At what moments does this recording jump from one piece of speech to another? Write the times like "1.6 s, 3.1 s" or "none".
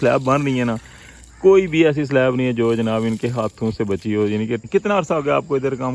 4.6 s